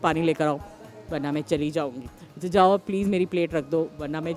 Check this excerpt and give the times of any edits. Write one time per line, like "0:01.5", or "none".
none